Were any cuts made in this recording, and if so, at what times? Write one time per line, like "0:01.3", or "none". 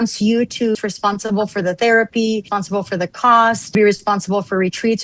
0:00.8
0:02.6
0:03.8